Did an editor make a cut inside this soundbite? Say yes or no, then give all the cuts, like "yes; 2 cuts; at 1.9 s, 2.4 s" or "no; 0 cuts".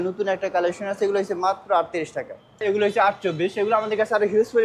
yes; 1 cut; at 2.6 s